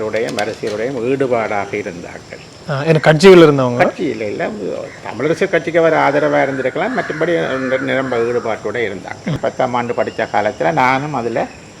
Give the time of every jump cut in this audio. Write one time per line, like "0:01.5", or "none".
0:09.4